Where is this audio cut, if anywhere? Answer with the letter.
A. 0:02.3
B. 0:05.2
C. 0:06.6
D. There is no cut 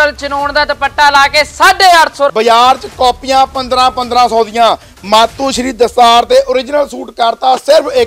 A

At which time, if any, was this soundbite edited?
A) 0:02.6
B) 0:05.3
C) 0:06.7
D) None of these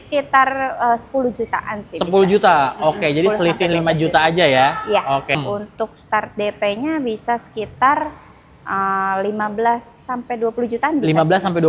B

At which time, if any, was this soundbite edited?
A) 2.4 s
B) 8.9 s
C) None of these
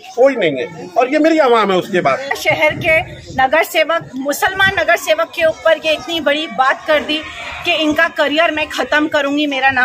A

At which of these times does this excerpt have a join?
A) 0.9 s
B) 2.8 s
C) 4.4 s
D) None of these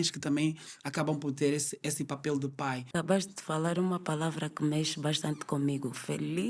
B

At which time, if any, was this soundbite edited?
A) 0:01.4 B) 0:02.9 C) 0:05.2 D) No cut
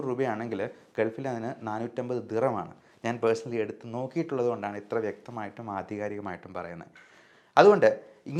D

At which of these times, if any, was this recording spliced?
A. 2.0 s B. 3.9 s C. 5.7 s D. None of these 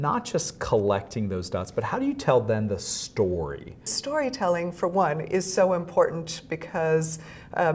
B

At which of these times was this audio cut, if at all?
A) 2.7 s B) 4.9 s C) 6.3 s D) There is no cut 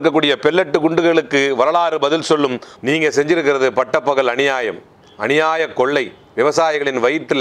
A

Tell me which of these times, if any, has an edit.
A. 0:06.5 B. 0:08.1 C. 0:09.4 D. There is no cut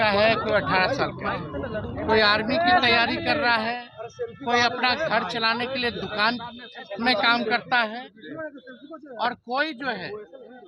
D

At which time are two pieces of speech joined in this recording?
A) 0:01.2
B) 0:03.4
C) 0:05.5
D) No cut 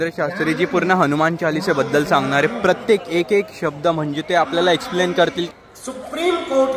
C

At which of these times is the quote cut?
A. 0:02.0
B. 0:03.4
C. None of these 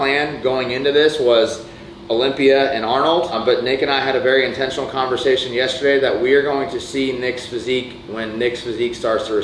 B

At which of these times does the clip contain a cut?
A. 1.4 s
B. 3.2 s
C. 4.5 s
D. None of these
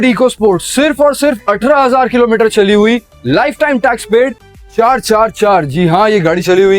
C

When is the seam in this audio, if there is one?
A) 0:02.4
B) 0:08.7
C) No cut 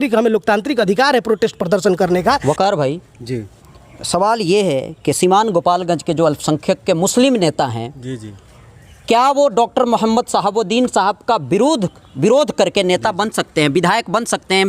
A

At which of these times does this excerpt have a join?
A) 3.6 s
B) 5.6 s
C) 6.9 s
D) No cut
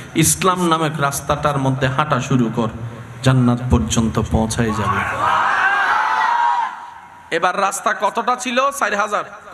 D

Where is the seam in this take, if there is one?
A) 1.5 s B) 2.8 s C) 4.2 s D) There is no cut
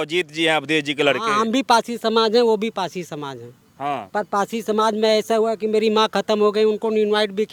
D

